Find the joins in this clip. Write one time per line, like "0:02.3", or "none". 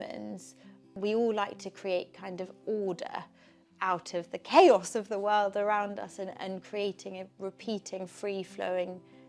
0:00.9